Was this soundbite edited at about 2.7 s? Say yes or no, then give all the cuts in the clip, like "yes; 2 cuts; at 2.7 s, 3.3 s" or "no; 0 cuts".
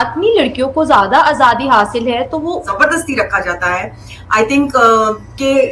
yes; 1 cut; at 2.7 s